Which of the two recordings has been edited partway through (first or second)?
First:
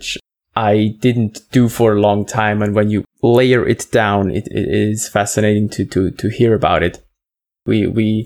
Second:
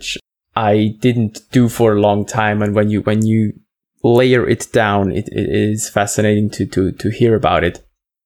first